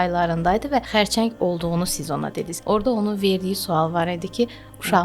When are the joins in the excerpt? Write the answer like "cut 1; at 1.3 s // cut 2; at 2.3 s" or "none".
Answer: cut 1; at 0.9 s // cut 2; at 2.5 s